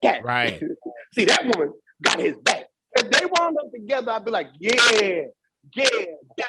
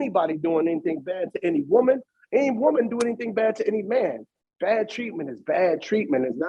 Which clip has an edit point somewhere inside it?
first; 1 cut; at 2.9 s

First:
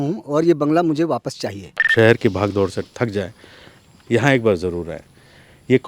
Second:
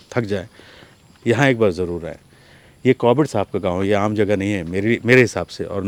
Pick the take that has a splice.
first; 1 cut; at 1.9 s

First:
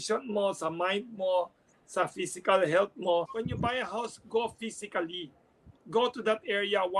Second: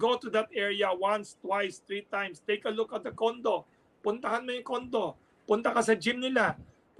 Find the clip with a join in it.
first; 1 cut; at 3.3 s

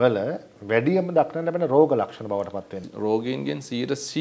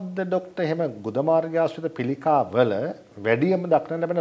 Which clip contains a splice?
first; 1 cut; at 2.8 s

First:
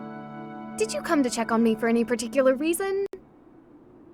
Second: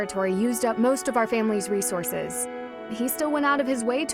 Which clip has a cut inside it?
first; 1 cut; at 3.1 s

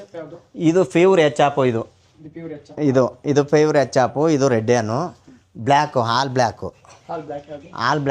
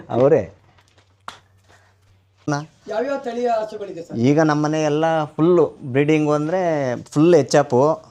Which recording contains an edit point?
second; 1 cut; at 2.5 s

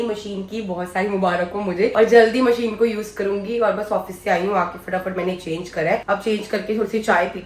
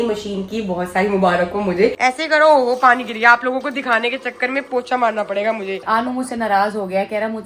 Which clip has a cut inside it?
second; 2 cuts; at 1.9 s, 5.8 s

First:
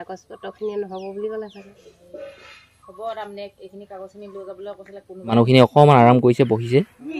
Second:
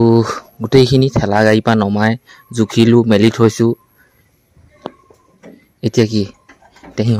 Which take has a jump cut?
first; 1 cut; at 5.3 s

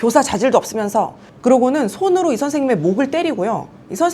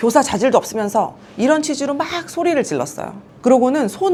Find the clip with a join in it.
first; 1 cut; at 1.2 s

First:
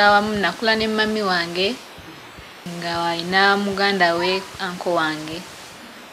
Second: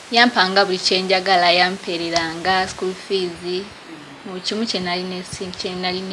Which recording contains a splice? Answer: first; 1 cut; at 2.7 s

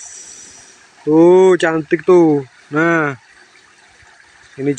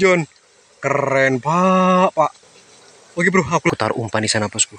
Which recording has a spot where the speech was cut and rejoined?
second; 1 cut; at 3.7 s

